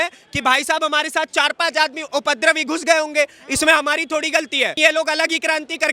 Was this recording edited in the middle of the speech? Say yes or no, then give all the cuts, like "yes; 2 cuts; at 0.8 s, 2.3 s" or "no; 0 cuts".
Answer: yes; 1 cut; at 4.8 s